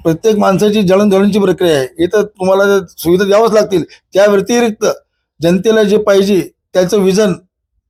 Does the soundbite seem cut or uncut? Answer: uncut